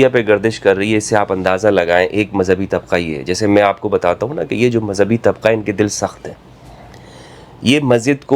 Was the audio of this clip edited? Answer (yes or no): no